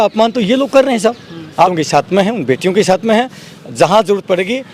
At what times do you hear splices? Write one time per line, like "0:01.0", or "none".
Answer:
0:01.7